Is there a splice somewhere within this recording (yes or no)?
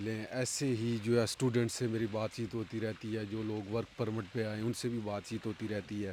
no